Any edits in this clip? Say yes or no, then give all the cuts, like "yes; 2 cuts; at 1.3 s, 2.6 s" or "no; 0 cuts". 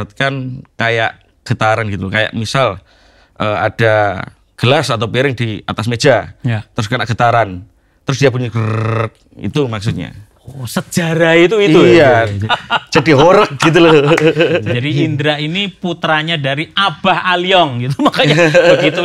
yes; 2 cuts; at 12.5 s, 14.7 s